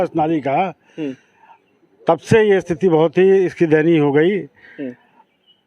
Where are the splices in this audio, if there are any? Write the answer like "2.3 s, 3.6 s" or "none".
none